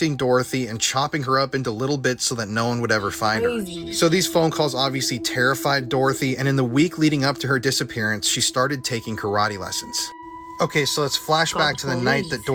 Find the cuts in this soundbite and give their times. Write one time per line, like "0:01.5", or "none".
none